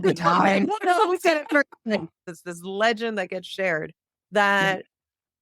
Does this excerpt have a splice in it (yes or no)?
yes